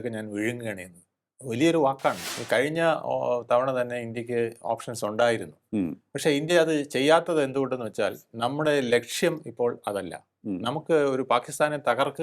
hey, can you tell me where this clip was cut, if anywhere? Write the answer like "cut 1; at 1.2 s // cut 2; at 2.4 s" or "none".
cut 1; at 2.3 s